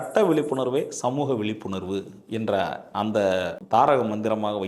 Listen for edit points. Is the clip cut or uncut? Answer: cut